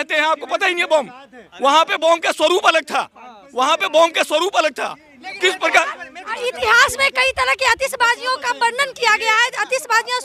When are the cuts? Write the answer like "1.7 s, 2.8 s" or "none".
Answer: none